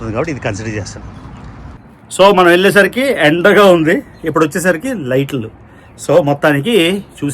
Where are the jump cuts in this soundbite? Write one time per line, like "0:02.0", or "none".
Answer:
0:01.7